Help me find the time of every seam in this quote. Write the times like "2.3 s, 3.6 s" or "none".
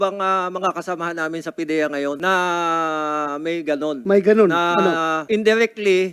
2.2 s, 4.0 s, 5.2 s